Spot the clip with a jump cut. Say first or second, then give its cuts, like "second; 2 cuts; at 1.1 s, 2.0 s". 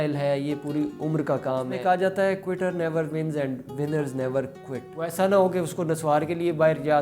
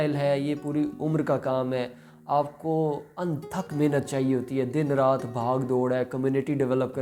first; 2 cuts; at 1.8 s, 5.0 s